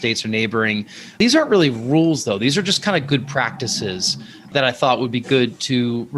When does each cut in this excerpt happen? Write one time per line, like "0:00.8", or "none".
0:01.1
0:04.5